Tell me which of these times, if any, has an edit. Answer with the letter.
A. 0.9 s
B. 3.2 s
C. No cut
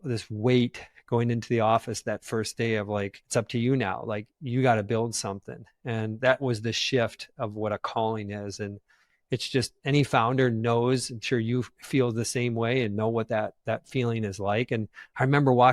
B